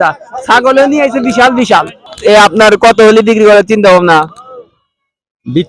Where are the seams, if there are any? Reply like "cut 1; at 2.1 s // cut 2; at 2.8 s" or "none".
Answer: cut 1; at 2.0 s